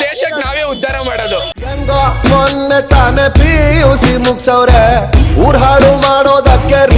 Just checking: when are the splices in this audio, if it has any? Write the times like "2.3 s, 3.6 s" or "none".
none

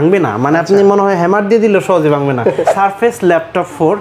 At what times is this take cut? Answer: 2.7 s

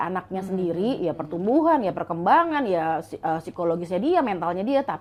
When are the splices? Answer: none

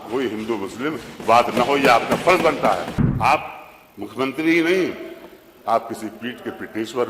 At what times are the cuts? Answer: 3.0 s

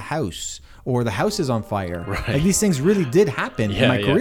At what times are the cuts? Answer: none

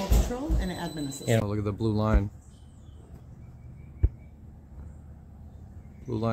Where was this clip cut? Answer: 1.4 s

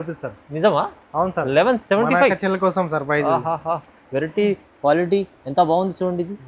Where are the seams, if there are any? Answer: none

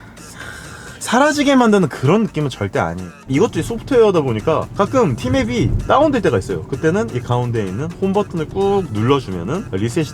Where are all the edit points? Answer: 0.9 s, 3.2 s

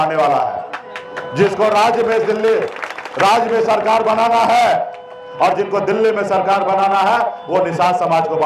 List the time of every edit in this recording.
none

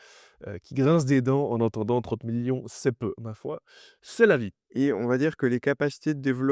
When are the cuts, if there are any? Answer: 4.6 s

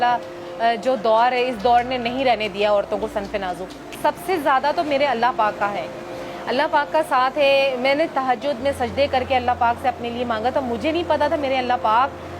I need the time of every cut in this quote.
4.0 s

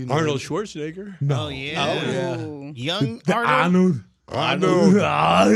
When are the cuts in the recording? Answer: none

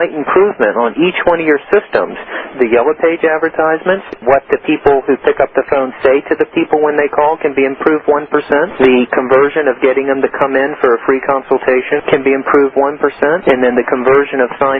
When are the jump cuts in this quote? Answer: 2.5 s, 4.2 s, 8.7 s, 12.0 s, 13.4 s

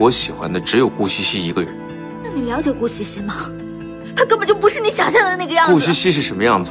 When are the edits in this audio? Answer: 2.3 s

